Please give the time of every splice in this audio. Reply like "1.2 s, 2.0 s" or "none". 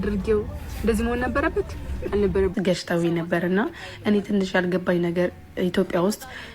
2.5 s